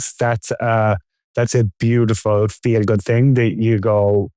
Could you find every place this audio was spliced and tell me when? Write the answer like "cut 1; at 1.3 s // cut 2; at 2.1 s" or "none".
none